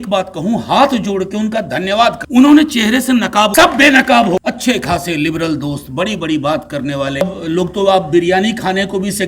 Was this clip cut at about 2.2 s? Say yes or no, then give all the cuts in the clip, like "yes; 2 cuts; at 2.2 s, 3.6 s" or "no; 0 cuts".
yes; 4 cuts; at 2.2 s, 3.5 s, 4.4 s, 7.2 s